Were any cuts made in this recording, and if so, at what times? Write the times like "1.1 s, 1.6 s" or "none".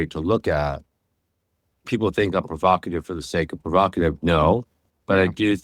none